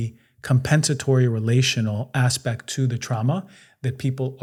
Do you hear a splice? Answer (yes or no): no